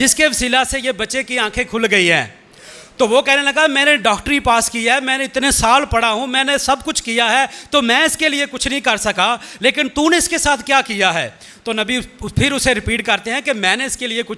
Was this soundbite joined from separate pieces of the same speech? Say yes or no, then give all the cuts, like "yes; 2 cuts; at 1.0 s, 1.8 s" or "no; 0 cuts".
no; 0 cuts